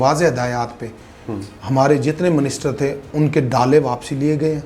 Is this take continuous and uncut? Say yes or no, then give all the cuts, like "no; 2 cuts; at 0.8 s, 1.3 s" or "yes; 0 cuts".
yes; 0 cuts